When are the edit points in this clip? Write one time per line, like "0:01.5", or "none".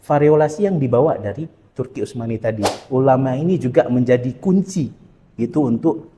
0:02.8